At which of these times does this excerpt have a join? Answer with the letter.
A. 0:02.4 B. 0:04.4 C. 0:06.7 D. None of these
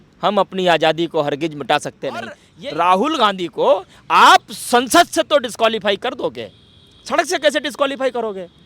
A